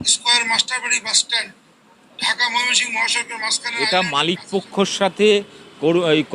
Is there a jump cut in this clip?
yes; 1 cut; at 3.9 s

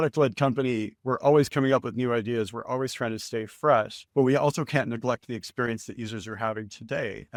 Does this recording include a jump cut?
no; 0 cuts

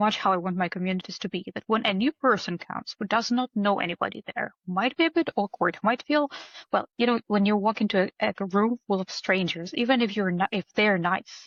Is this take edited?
no; 0 cuts

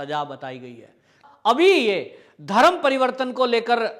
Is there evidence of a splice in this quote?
yes; 1 cut; at 1.2 s

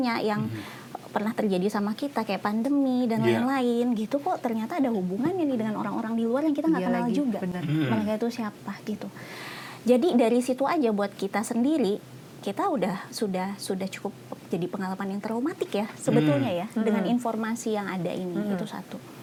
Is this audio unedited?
yes; 0 cuts

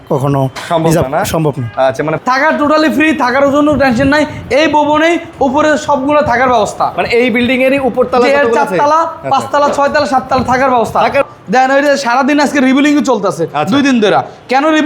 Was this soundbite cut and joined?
yes; 2 cuts; at 2.2 s, 11.2 s

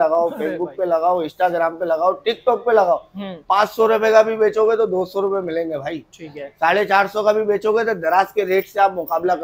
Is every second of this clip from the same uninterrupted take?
yes; 0 cuts

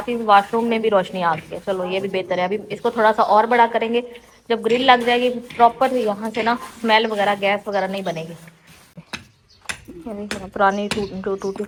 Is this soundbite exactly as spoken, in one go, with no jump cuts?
yes; 0 cuts

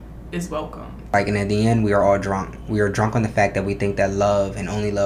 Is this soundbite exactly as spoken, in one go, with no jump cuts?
no; 1 cut; at 1.1 s

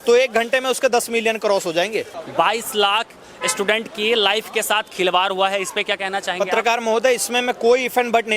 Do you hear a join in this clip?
yes; 1 cut; at 2.2 s

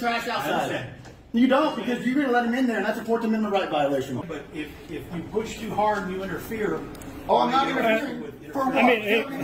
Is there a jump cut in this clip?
yes; 1 cut; at 4.3 s

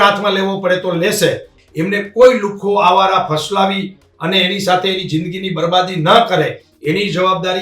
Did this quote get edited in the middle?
yes; 1 cut; at 1.6 s

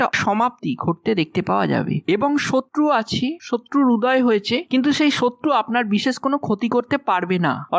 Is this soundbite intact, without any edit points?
no; 1 cut; at 2.0 s

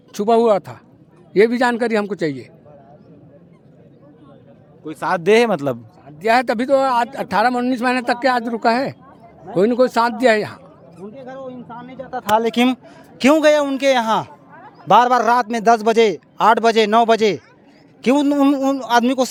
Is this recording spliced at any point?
no; 0 cuts

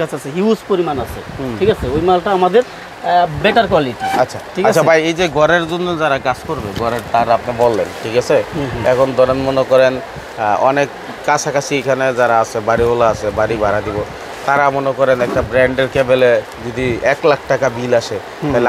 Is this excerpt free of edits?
yes; 0 cuts

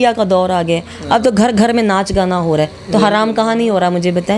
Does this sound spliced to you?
no; 0 cuts

